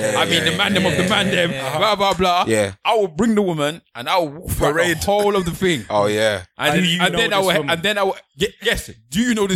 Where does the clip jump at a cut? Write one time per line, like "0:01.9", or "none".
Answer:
none